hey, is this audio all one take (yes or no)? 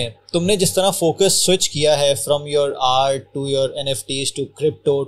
yes